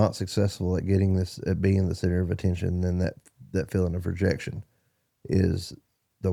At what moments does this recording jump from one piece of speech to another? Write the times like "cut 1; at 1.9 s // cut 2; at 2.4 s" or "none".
none